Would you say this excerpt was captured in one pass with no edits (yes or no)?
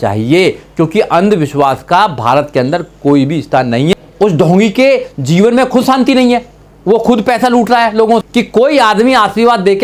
no